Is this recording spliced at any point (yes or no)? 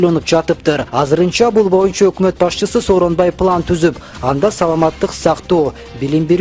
no